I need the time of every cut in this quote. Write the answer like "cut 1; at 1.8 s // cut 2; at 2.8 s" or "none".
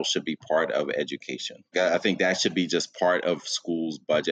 cut 1; at 1.7 s